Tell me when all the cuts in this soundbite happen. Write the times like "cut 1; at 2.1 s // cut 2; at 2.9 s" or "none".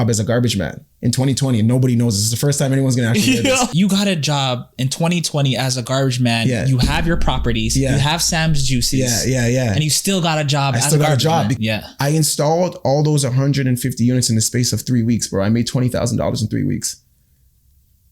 cut 1; at 3.7 s // cut 2; at 11.6 s